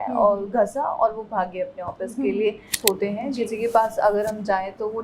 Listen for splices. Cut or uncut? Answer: cut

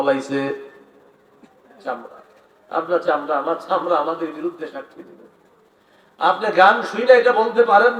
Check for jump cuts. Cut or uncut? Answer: uncut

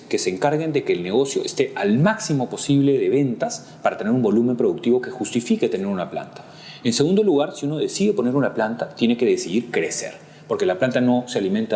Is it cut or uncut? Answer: uncut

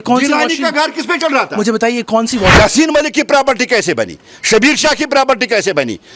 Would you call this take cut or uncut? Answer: cut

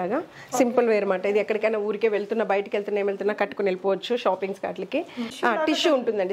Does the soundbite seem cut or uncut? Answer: cut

